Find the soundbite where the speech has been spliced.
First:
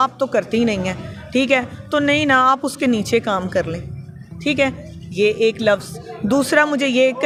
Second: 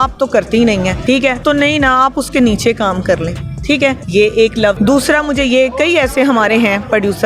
second; 3 cuts; at 1.2 s, 3.8 s, 4.8 s

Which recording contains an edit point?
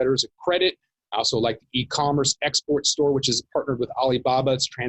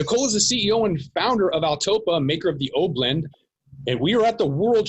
second; 1 cut; at 3.3 s

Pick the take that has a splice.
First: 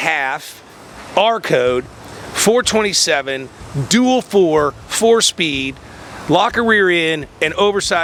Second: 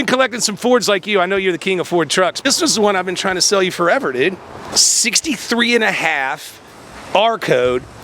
second; 2 cuts; at 2.5 s, 4.7 s

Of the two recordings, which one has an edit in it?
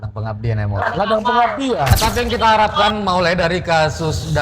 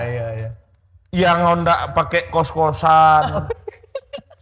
first; 1 cut; at 2.0 s

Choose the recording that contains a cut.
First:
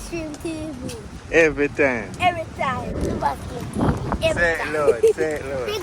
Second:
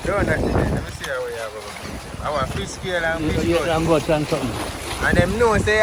first; 1 cut; at 3.0 s

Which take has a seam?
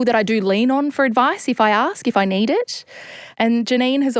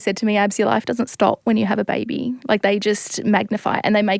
first; 1 cut; at 3.3 s

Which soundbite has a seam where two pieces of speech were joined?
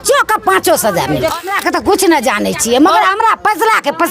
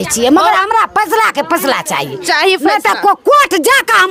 first; 1 cut; at 1.5 s

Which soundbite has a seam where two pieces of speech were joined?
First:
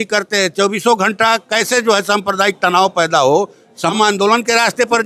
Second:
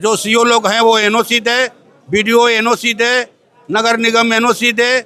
first; 1 cut; at 3.9 s

